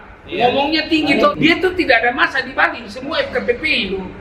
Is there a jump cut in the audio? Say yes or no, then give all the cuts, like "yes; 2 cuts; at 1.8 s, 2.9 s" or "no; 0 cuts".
yes; 1 cut; at 1.3 s